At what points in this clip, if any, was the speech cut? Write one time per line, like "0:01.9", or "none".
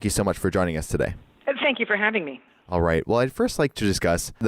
0:01.3